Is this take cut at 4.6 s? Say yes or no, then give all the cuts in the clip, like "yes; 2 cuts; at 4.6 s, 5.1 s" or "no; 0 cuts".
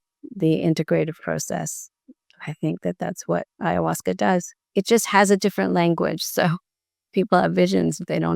yes; 1 cut; at 4.6 s